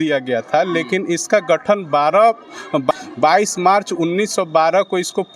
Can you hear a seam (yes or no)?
no